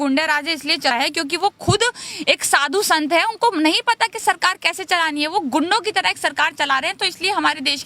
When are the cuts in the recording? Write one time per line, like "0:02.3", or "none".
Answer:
0:00.9